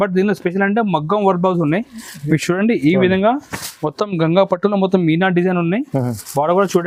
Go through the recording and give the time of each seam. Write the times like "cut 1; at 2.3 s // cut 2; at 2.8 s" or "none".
none

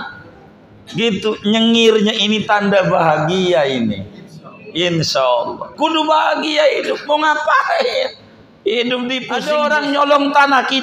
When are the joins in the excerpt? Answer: cut 1; at 9.3 s

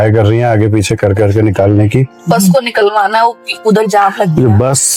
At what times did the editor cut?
none

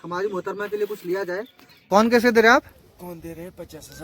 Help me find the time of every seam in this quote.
cut 1; at 1.7 s

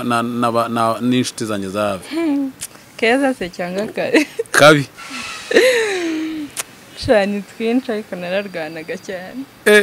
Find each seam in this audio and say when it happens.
none

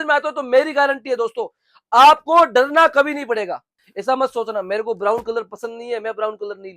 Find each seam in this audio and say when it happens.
cut 1; at 3.6 s

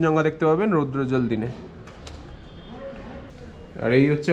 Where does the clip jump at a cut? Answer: cut 1; at 3.3 s

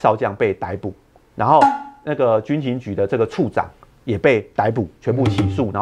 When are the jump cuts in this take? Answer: none

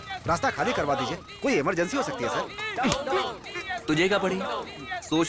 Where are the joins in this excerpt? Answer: cut 1; at 2.6 s

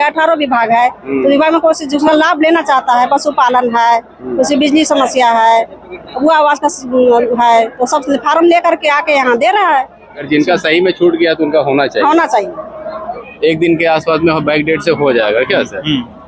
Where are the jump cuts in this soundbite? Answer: cut 1; at 10.2 s // cut 2; at 13.2 s

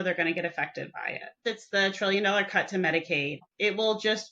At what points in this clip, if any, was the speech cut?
cut 1; at 1.4 s // cut 2; at 3.4 s

